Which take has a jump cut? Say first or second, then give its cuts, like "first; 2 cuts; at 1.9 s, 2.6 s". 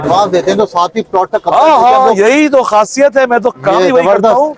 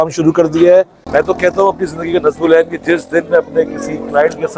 second; 1 cut; at 1.0 s